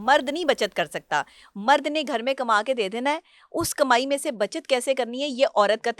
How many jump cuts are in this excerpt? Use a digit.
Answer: 0